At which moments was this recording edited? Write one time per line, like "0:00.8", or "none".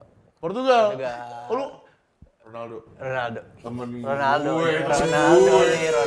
none